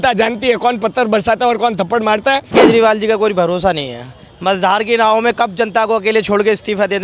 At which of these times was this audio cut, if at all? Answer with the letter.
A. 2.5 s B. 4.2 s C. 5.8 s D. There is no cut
A